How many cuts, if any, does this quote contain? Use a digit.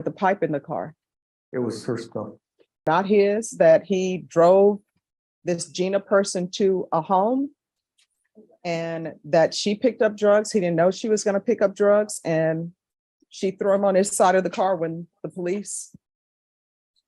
1